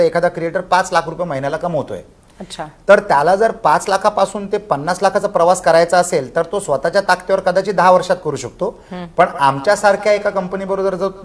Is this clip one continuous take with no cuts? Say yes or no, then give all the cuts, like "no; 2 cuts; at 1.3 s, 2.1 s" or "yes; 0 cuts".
yes; 0 cuts